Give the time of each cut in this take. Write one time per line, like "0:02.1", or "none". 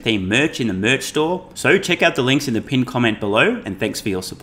0:01.5